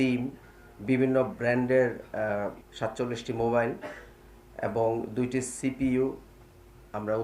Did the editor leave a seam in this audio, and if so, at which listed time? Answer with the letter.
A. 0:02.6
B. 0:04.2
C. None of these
A